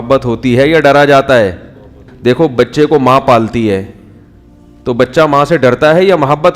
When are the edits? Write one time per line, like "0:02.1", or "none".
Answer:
0:02.0